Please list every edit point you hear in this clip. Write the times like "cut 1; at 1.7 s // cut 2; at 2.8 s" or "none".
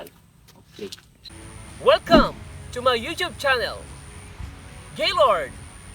cut 1; at 1.1 s